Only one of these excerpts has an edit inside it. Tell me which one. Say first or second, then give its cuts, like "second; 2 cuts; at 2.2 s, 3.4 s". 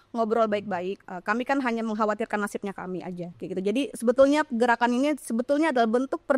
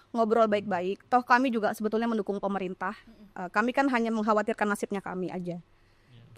first; 2 cuts; at 1.0 s, 3.3 s